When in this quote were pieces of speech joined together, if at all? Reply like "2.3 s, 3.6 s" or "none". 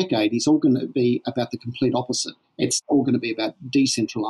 2.9 s